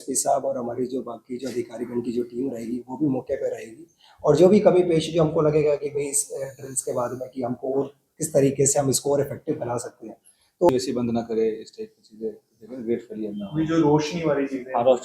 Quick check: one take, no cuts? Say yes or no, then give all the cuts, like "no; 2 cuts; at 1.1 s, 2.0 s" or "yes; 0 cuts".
no; 1 cut; at 10.7 s